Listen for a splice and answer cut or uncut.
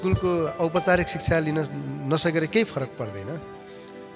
uncut